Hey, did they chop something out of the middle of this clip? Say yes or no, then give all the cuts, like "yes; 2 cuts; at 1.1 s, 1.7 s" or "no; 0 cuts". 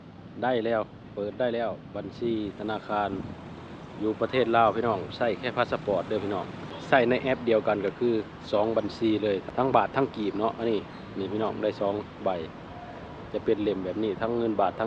yes; 2 cuts; at 6.8 s, 9.4 s